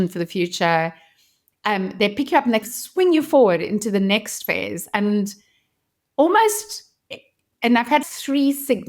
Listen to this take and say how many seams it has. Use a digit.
2